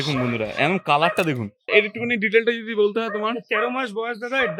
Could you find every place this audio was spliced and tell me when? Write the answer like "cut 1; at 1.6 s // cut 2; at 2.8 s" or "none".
cut 1; at 1.7 s